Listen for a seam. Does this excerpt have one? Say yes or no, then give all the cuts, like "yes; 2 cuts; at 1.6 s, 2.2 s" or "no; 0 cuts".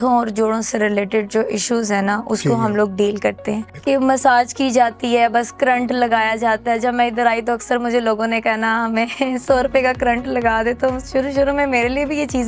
yes; 1 cut; at 3.7 s